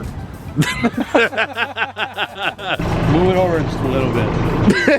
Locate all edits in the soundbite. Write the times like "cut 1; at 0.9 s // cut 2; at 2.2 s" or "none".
cut 1; at 2.8 s